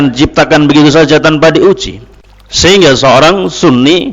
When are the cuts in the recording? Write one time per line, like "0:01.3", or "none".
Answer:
0:02.7